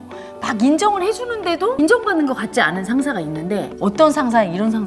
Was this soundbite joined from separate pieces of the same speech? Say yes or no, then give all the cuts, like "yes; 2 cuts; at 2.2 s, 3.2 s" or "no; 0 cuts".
yes; 2 cuts; at 1.7 s, 3.7 s